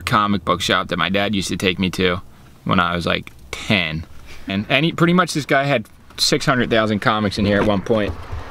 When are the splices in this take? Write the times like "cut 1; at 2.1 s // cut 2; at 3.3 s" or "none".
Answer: cut 1; at 4.5 s